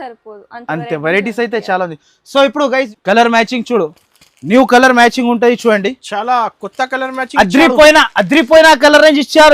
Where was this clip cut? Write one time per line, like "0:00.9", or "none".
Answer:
0:02.9